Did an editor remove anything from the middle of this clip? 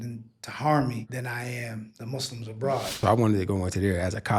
yes; 2 cuts; at 1.4 s, 3.0 s

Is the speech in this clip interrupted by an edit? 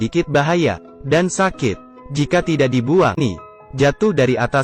yes; 1 cut; at 3.2 s

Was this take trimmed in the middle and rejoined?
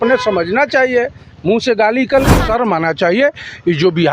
yes; 1 cut; at 2.3 s

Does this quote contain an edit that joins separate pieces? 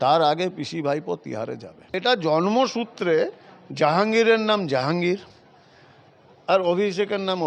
yes; 1 cut; at 2.0 s

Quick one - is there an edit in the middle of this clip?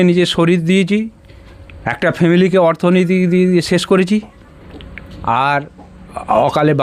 no; 0 cuts

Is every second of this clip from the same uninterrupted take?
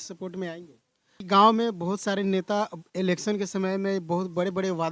no; 1 cut; at 1.2 s

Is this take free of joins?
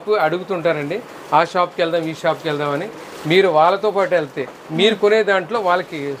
yes; 0 cuts

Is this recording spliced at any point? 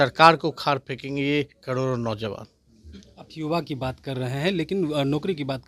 no; 0 cuts

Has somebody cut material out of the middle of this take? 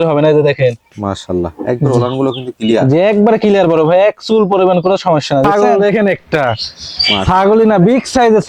yes; 1 cut; at 5.5 s

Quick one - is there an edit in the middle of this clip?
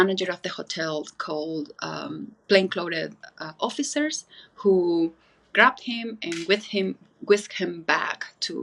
no; 0 cuts

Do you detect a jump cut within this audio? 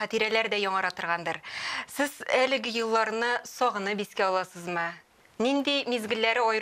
no; 0 cuts

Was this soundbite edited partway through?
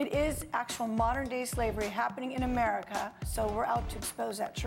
yes; 1 cut; at 3.2 s

